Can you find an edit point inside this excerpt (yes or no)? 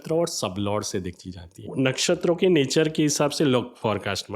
yes